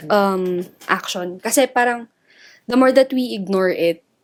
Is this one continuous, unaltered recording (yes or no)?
yes